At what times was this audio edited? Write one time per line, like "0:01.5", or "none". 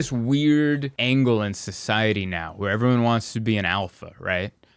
0:00.9

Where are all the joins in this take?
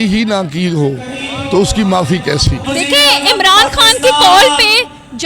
0:02.6

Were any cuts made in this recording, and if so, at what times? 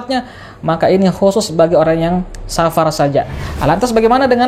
0:03.4

